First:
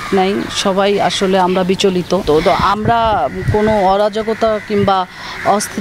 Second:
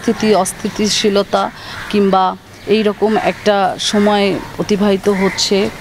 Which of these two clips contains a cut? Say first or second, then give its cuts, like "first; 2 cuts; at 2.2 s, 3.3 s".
first; 1 cut; at 2.2 s